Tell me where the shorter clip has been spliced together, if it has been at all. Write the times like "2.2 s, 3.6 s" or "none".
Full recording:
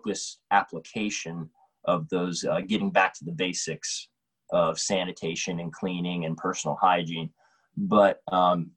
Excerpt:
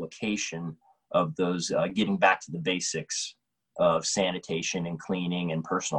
none

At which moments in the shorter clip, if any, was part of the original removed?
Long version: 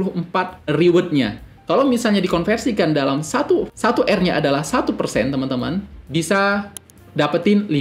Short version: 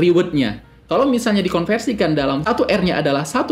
2.4 s

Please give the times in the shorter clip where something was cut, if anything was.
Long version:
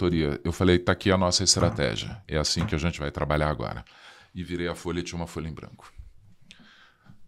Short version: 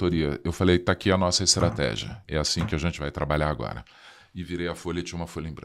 none

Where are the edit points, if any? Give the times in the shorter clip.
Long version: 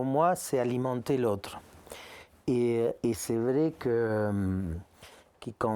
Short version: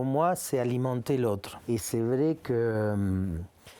1.6 s

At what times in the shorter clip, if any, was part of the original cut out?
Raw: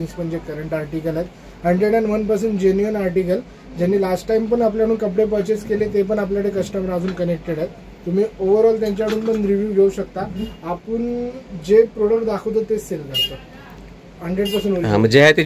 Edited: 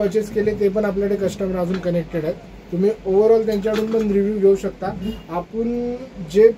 none

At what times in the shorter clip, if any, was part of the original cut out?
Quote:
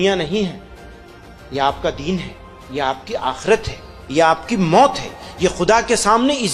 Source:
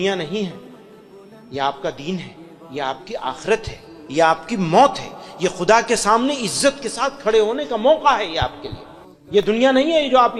none

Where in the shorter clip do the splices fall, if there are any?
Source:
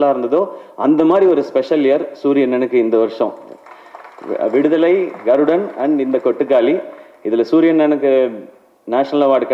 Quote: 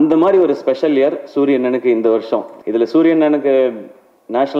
2.5 s

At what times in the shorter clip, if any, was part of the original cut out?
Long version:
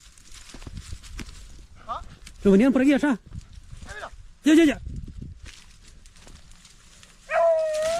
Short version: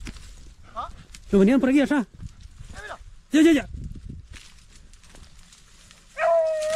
none

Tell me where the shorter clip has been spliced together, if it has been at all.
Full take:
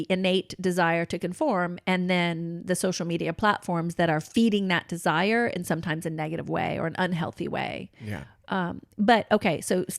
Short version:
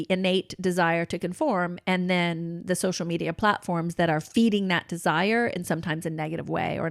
none

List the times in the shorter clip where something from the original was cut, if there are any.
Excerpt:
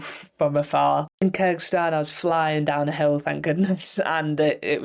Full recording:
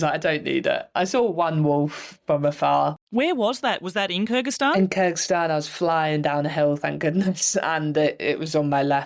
1.2 s

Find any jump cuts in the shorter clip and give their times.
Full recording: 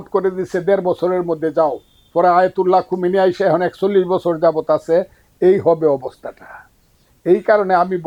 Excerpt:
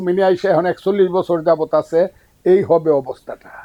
none

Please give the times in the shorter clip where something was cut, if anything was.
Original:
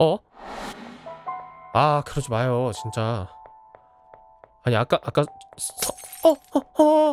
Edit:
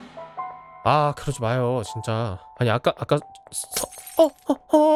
2.4 s

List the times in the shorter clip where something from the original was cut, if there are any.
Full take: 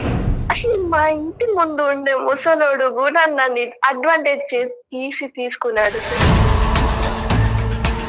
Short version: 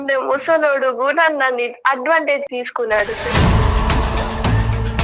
2.5 s

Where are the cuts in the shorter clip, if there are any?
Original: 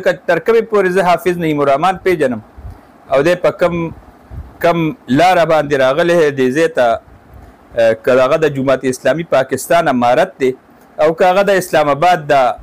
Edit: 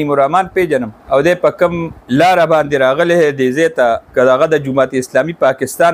1.0 s, 2.0 s, 4.1 s

